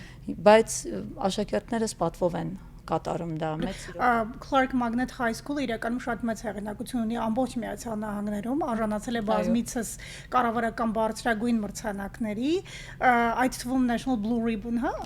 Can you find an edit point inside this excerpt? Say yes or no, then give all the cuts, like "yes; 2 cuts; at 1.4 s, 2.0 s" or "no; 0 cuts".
yes; 1 cut; at 3.7 s